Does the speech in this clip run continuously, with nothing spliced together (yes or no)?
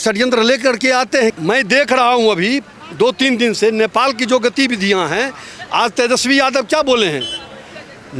no